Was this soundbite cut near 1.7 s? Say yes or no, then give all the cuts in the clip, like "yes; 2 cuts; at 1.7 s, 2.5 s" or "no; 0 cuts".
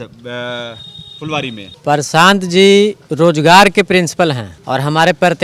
yes; 2 cuts; at 1.7 s, 4.5 s